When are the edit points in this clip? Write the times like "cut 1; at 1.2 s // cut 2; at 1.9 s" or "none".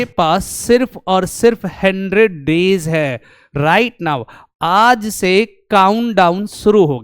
none